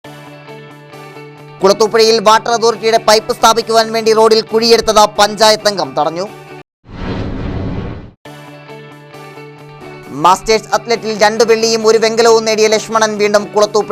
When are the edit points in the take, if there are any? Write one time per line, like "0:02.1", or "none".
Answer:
0:01.4